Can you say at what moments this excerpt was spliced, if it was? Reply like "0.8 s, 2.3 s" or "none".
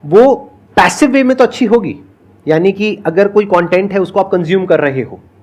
none